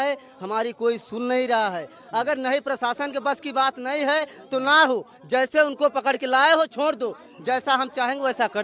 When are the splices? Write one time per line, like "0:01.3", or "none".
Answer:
none